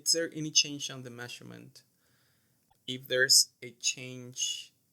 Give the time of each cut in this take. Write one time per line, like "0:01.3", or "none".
0:02.7